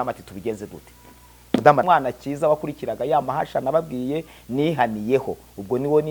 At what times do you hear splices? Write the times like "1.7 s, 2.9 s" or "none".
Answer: 1.8 s